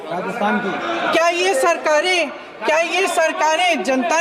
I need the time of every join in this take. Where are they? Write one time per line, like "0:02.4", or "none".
none